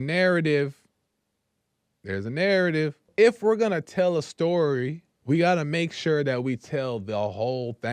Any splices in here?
yes; 1 cut; at 3.1 s

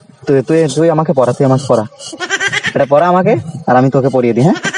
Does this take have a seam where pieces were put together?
no; 0 cuts

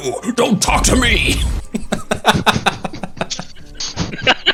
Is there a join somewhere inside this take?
no; 0 cuts

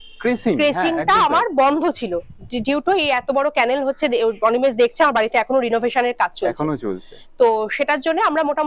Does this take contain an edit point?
no; 0 cuts

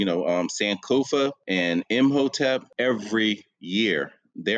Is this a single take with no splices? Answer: no; 2 cuts; at 1.4 s, 2.7 s

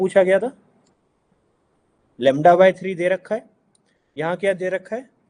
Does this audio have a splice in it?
yes; 1 cut; at 2.0 s

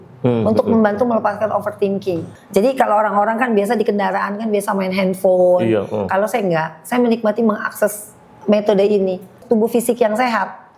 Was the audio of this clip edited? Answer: yes; 2 cuts; at 2.3 s, 9.4 s

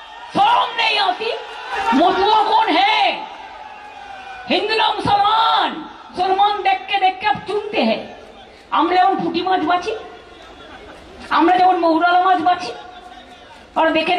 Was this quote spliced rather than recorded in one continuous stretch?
yes; 2 cuts; at 1.8 s, 6.2 s

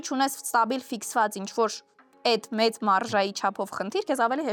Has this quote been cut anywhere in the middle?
no; 0 cuts

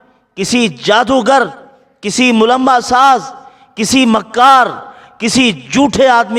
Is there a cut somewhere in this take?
no; 0 cuts

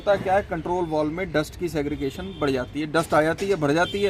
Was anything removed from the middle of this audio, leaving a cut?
no; 0 cuts

